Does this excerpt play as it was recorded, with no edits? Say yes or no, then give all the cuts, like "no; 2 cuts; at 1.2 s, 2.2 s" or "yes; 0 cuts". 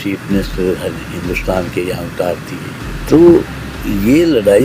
no; 1 cut; at 2.8 s